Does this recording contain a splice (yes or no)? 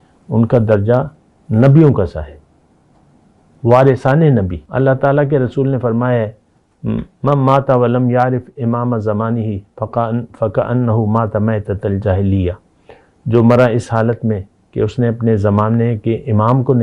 yes